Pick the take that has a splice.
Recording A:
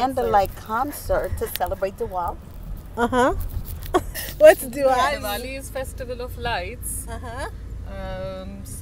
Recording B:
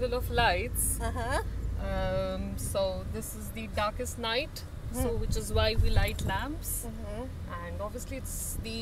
A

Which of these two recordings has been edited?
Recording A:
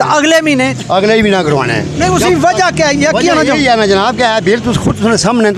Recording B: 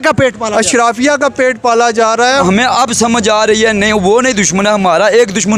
B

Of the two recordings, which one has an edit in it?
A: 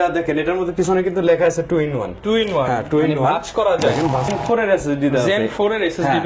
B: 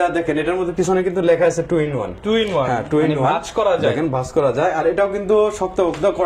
A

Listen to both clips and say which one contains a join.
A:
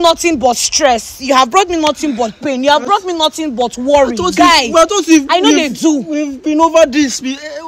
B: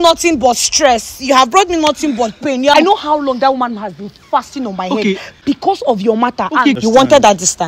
B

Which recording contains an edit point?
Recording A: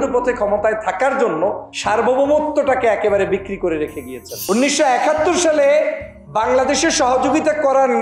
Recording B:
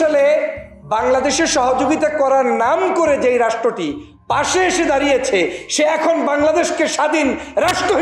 A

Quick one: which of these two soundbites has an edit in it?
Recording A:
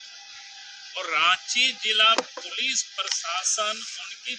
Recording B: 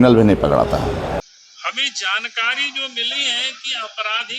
B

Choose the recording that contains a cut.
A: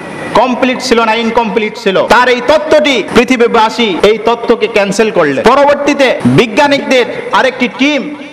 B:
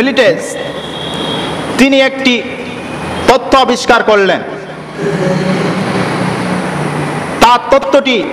A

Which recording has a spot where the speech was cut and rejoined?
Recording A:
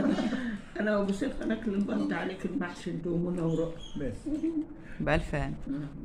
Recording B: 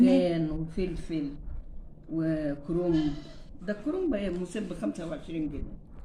A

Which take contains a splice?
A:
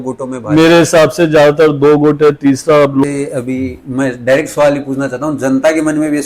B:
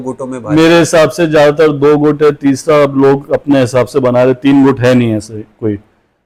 A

